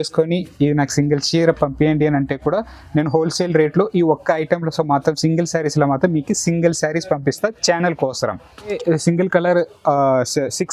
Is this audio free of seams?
no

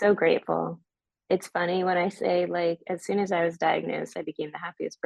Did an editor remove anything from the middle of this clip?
no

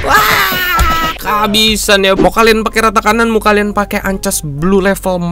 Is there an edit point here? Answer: yes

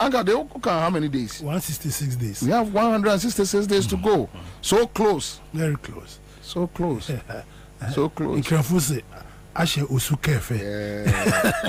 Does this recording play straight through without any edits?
yes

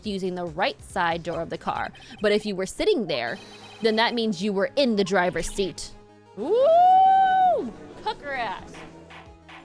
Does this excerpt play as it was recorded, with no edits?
yes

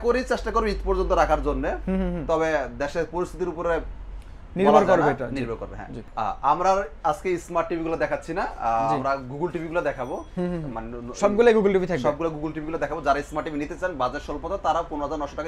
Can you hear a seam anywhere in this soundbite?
no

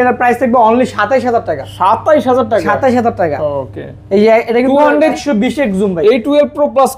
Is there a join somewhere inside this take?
yes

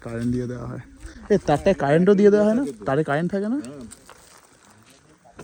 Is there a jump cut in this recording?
no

